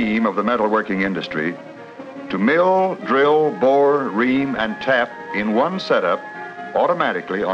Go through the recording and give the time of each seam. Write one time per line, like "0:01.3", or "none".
0:02.4